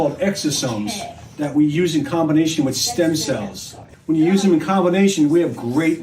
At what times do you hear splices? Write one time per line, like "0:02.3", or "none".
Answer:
0:03.9